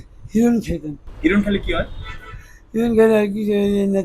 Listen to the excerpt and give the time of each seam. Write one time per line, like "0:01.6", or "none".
0:01.0